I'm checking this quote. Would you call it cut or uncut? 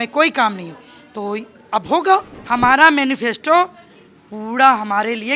cut